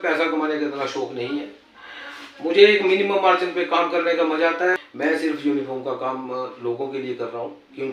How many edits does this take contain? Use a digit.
1